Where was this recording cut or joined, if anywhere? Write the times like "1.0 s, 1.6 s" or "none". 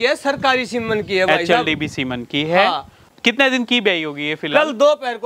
3.1 s